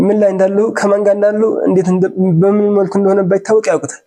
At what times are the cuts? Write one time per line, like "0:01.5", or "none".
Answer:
none